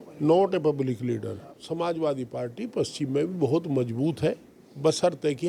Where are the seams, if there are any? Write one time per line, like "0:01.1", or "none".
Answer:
0:01.6